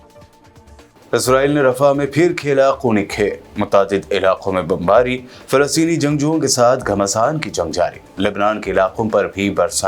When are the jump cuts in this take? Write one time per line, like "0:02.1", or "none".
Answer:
none